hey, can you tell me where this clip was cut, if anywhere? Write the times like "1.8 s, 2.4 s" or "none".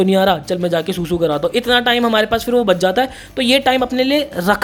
none